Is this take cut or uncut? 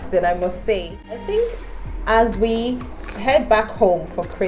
cut